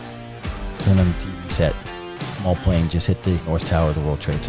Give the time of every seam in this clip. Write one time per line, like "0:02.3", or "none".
0:03.4